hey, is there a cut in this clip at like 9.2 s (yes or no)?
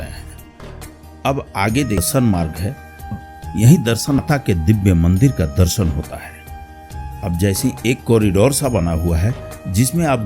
no